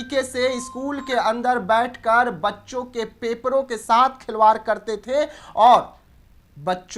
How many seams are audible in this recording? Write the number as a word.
zero